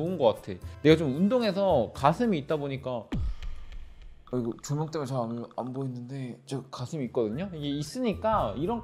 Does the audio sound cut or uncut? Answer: uncut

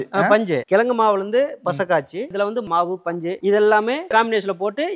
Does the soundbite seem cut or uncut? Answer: cut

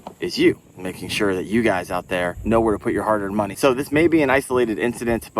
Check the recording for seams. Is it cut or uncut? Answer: cut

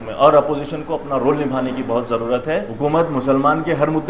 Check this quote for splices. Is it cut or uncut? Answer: cut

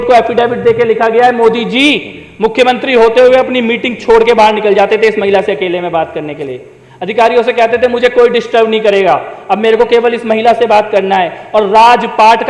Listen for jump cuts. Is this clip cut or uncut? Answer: uncut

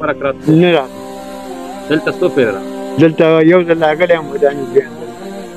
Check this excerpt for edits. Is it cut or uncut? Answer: uncut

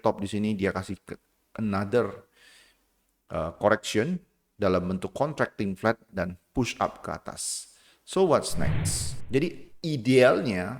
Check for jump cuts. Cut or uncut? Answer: cut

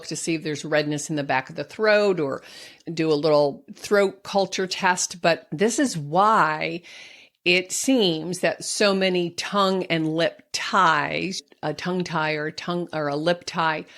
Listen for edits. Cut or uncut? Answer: cut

